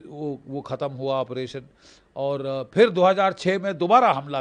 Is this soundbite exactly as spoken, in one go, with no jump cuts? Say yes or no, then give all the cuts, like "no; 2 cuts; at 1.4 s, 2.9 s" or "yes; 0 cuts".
yes; 0 cuts